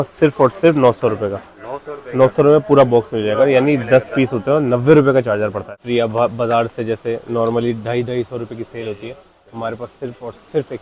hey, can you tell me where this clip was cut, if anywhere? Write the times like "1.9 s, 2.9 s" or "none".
5.7 s